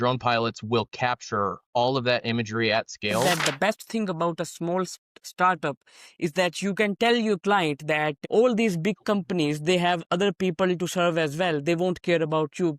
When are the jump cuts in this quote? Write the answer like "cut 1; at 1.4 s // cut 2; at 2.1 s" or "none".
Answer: cut 1; at 3.2 s